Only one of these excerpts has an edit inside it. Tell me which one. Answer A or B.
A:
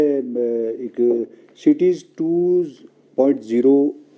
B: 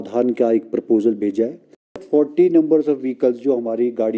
B